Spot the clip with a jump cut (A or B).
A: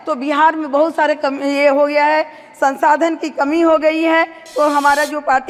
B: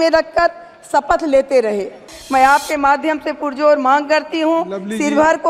B